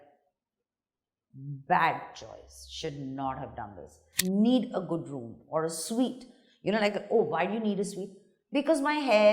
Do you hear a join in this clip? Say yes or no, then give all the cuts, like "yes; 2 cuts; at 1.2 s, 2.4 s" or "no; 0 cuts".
yes; 1 cut; at 4.0 s